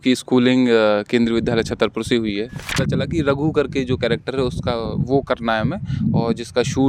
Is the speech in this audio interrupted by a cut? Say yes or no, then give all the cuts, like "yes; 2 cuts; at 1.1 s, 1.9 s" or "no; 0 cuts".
yes; 1 cut; at 2.8 s